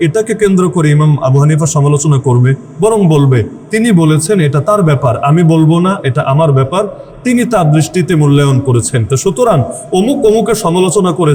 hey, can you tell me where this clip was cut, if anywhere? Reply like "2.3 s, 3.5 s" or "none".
none